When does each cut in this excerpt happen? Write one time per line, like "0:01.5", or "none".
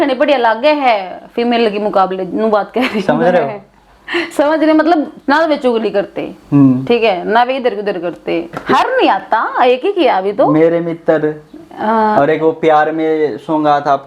0:08.6